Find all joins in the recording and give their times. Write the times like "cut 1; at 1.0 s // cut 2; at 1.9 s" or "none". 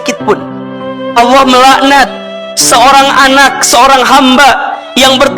cut 1; at 1.0 s